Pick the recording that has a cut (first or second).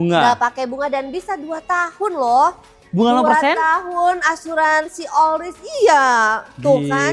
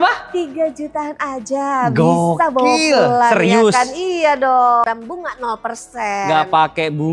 second